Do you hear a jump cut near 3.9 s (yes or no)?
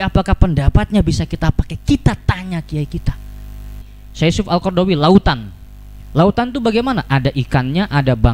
yes